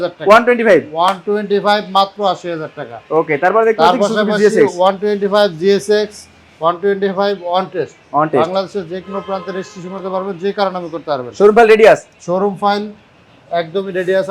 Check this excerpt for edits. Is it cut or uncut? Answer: uncut